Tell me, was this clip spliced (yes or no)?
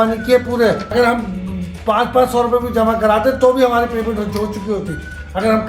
yes